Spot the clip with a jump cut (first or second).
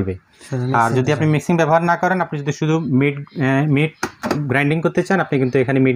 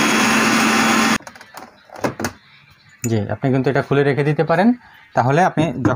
second